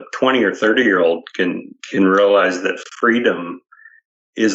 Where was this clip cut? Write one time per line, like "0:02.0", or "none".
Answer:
none

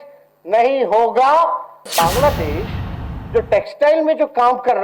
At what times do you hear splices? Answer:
0:01.9

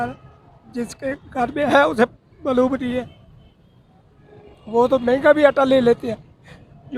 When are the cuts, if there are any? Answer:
none

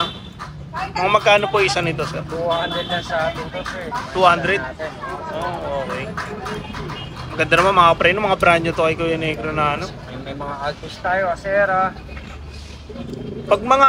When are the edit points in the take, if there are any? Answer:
none

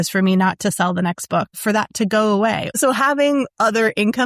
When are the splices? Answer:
0:01.5
0:02.7

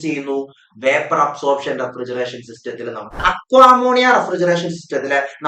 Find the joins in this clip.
0:03.2

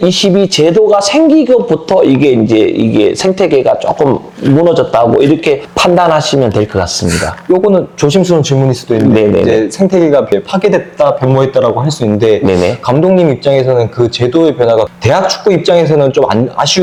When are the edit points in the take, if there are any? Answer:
none

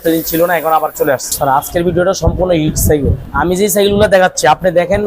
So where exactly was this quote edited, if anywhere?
0:01.3
0:03.3

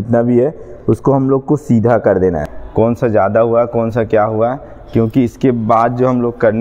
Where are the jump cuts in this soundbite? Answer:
0:02.5

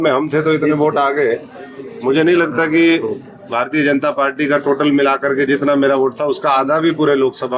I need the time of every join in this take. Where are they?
none

